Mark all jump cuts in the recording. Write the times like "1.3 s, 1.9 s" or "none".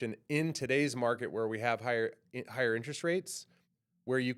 none

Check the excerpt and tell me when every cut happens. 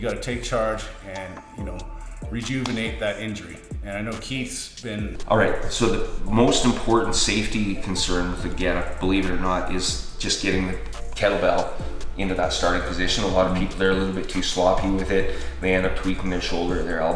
5.2 s

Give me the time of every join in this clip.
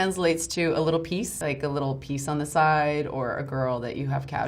1.3 s

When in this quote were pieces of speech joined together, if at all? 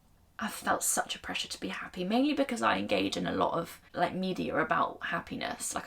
3.8 s

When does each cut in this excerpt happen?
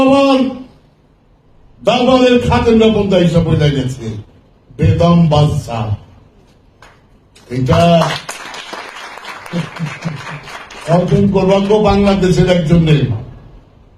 none

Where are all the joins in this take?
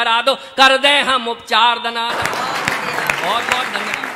none

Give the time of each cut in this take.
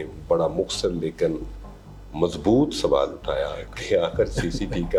none

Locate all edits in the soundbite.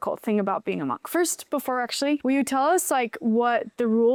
none

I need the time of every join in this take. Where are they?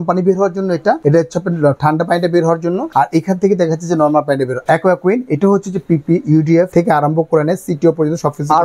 1.0 s, 2.8 s, 4.6 s, 6.7 s

